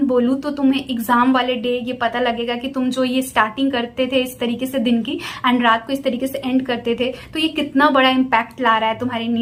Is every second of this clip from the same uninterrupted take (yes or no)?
yes